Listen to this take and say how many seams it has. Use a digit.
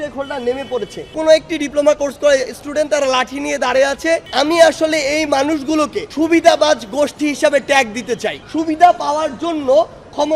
4